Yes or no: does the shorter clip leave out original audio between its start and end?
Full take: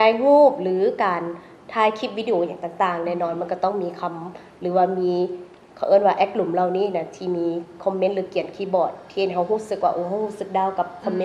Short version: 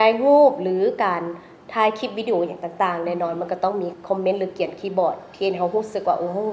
yes